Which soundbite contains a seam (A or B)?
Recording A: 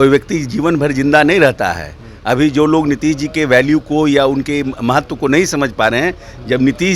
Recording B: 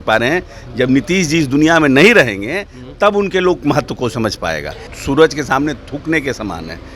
B